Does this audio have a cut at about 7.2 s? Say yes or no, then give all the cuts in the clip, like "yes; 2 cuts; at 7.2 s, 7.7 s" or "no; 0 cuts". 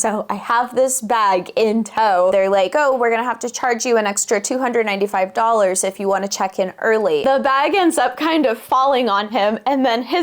yes; 2 cuts; at 2.3 s, 7.2 s